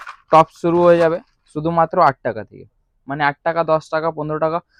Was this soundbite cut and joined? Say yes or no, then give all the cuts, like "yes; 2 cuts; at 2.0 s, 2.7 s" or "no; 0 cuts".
no; 0 cuts